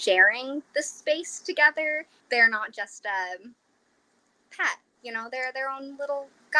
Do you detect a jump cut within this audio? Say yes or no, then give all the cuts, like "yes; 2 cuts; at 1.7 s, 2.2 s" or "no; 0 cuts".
yes; 1 cut; at 2.1 s